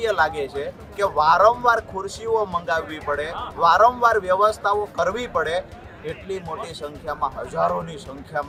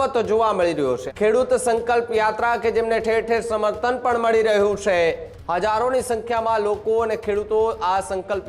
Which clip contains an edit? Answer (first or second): second